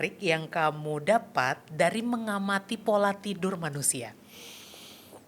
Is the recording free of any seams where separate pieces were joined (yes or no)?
yes